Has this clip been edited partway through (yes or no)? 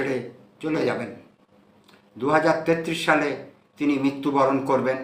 no